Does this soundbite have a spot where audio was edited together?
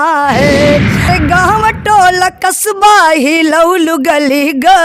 yes; 1 cut; at 1.1 s

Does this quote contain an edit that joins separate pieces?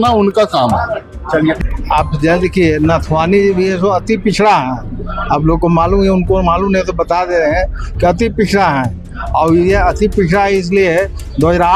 yes; 1 cut; at 1.6 s

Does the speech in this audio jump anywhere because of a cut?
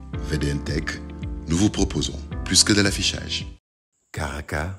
yes; 1 cut; at 3.8 s

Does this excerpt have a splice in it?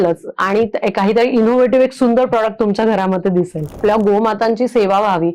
yes; 1 cut; at 3.8 s

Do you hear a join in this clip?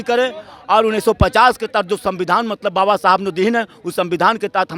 no; 0 cuts

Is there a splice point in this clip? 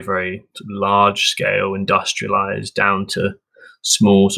no; 0 cuts

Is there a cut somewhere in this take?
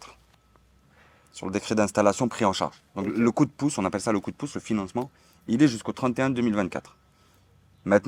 no; 0 cuts

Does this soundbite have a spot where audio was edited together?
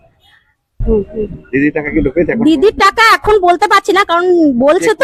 no; 0 cuts

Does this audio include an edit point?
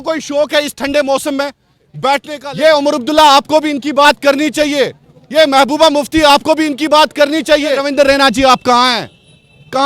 yes; 2 cuts; at 2.6 s, 7.8 s

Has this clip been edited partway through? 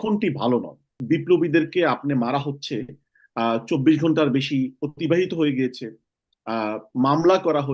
yes; 1 cut; at 0.9 s

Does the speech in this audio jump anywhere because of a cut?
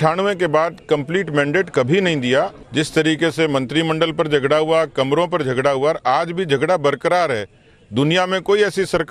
yes; 1 cut; at 2.6 s

